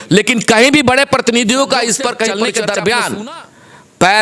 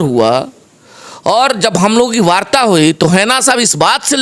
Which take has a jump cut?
first; 1 cut; at 2.4 s

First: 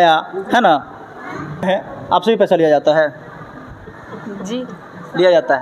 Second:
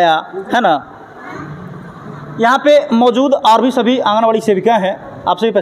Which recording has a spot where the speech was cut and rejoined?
first; 1 cut; at 1.7 s

